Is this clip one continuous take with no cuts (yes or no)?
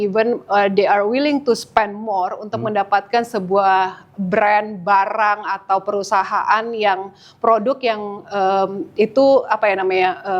yes